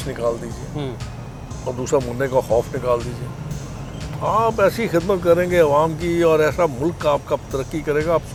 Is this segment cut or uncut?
uncut